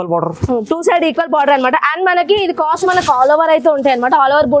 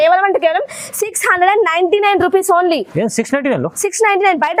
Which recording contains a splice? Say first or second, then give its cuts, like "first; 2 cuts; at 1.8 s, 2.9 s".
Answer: first; 1 cut; at 2.8 s